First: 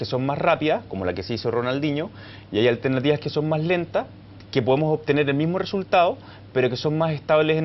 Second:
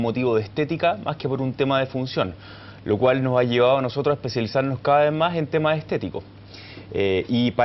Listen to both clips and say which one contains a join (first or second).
first